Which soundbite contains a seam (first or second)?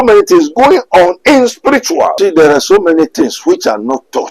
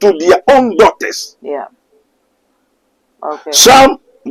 first